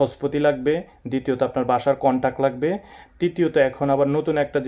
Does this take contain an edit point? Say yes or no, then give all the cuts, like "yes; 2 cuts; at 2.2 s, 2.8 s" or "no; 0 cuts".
no; 0 cuts